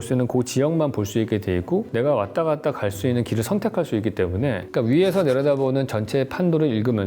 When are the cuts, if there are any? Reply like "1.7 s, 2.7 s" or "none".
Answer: 4.7 s

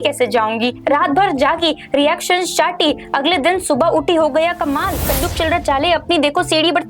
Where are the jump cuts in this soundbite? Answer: 5.1 s

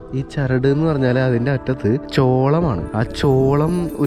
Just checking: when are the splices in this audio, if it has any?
2.1 s, 2.8 s

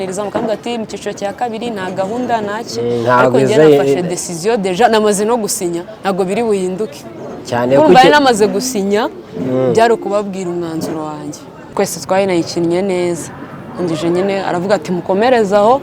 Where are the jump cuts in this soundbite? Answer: 11.7 s

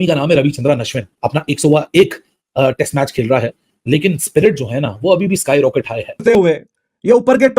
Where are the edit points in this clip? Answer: 6.1 s

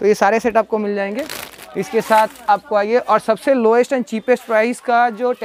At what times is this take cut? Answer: none

